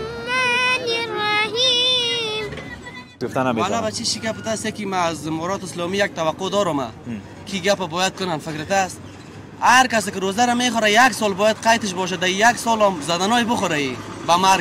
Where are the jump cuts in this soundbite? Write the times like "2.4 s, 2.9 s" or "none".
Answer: 3.2 s